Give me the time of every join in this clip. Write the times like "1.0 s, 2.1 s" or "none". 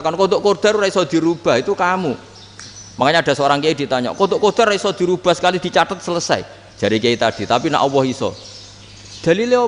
none